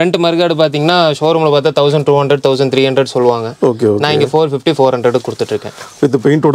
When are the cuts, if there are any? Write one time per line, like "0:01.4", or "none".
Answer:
none